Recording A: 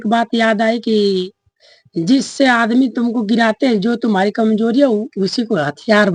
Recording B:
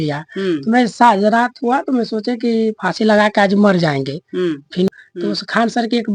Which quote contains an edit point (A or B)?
B